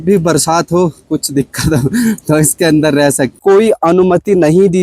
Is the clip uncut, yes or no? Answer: no